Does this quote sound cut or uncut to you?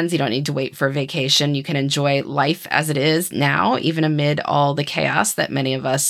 uncut